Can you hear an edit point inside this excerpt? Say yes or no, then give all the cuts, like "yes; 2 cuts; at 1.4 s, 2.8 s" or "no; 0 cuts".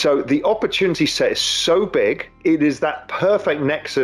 yes; 1 cut; at 2.3 s